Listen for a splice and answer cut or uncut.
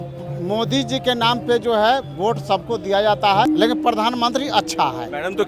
cut